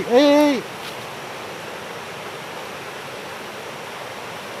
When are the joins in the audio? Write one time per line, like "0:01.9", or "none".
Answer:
none

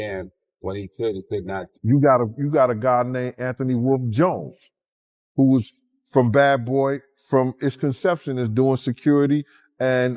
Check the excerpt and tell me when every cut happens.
0:01.6

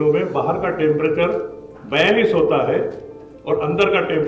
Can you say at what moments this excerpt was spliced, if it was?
none

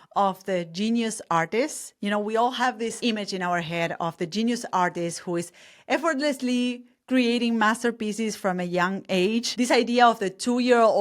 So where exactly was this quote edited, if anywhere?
0:03.0

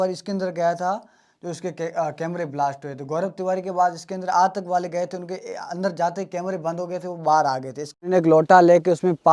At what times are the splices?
0:08.1

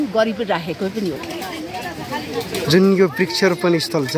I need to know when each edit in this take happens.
0:01.3

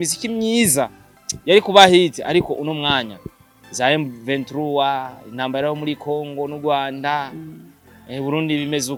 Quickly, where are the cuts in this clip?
none

